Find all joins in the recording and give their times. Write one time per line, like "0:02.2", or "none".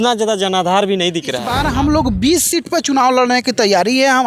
0:01.5